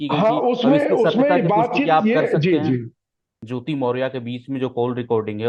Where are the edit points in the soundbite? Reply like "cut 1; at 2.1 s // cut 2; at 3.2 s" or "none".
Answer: cut 1; at 3.4 s